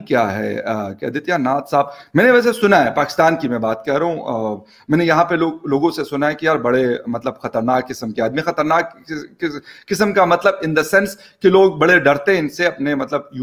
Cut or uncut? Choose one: uncut